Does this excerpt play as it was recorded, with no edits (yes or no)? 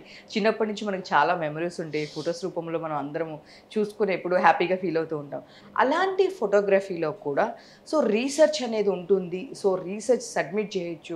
yes